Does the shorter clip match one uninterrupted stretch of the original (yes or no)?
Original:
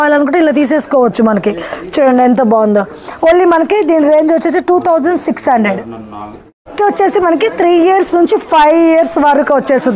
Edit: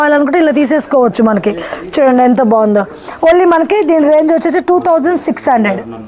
yes